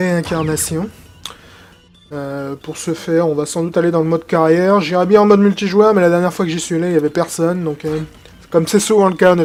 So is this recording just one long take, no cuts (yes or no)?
yes